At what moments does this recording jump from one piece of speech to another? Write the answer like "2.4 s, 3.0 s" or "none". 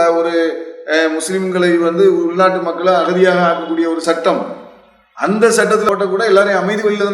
5.8 s